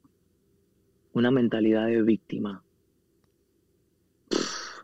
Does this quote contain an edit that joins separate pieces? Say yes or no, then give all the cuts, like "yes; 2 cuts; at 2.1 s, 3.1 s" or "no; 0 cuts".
no; 0 cuts